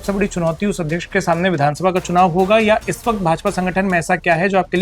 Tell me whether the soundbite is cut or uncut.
uncut